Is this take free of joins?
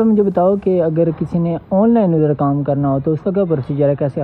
yes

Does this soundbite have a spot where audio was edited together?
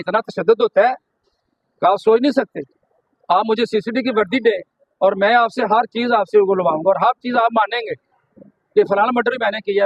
no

